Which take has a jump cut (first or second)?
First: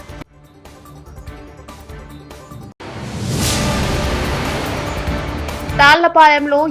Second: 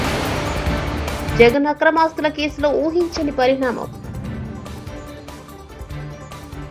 first